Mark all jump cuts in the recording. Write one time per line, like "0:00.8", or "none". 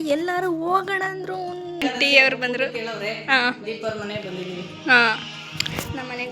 0:01.8